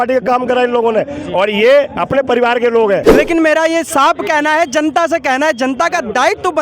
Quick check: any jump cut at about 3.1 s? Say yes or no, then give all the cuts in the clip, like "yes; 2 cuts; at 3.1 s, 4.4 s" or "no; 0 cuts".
yes; 1 cut; at 3.1 s